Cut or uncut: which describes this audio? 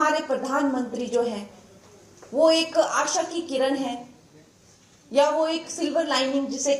uncut